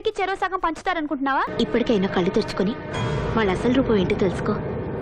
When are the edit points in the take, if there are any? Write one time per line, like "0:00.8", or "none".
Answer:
0:01.5